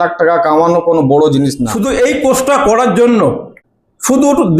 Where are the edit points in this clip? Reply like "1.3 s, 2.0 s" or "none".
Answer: 1.7 s, 3.6 s